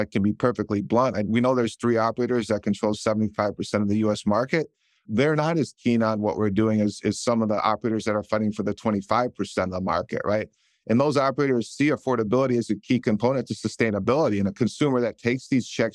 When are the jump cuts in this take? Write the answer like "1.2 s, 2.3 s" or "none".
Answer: none